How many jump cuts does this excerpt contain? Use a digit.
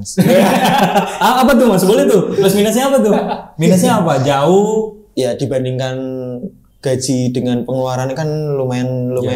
1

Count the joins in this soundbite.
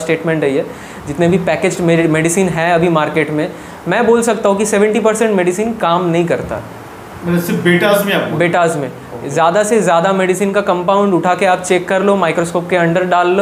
0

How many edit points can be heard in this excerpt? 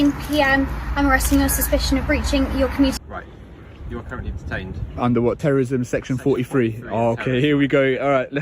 1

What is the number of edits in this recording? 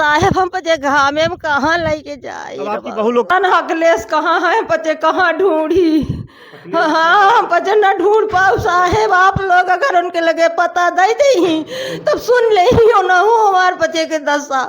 1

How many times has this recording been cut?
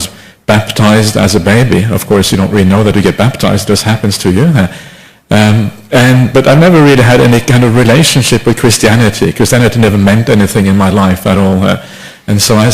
1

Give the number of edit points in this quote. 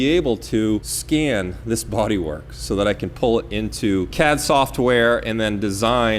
2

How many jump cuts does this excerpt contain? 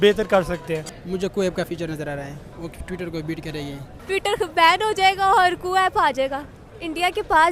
3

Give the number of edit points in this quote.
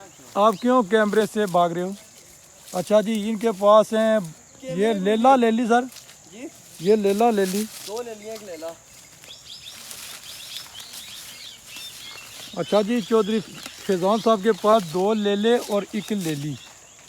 0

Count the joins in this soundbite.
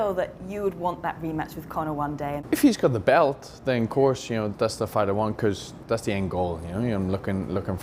3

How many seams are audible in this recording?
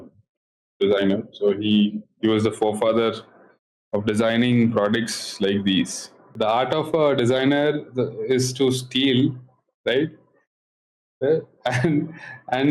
1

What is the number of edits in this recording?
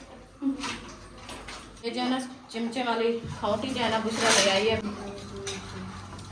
2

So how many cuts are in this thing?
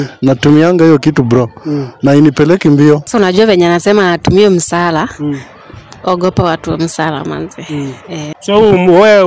2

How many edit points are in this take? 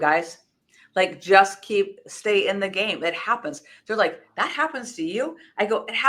0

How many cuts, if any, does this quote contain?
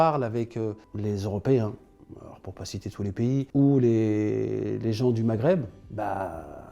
4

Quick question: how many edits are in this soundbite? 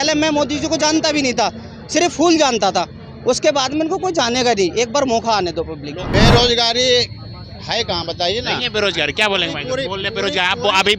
1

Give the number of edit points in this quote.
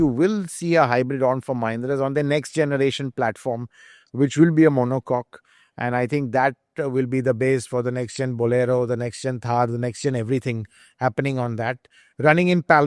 0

